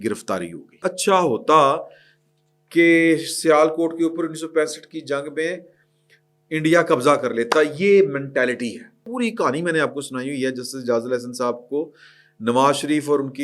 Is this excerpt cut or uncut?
cut